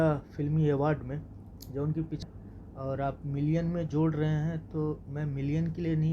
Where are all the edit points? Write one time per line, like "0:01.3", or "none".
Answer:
0:02.2